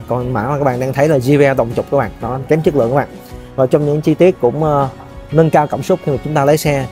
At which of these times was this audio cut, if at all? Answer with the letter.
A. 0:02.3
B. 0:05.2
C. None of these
A